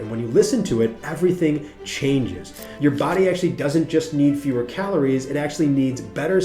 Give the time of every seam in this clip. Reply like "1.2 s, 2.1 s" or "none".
2.6 s

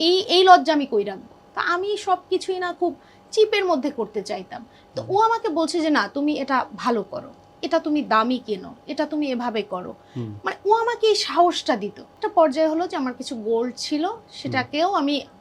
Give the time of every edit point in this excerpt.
1.3 s, 12.1 s

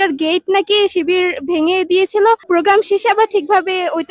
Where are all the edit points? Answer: 2.4 s

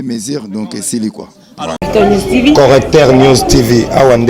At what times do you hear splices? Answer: 1.8 s

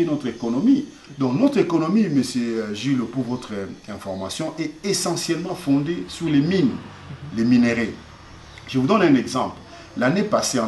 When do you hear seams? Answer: none

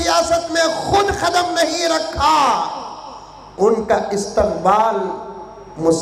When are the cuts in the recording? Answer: none

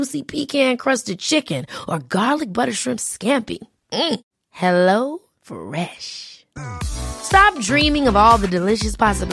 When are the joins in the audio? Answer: none

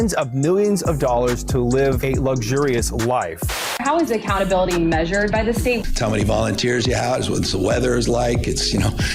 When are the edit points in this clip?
6.8 s

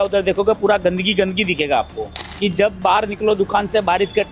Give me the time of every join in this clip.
2.2 s

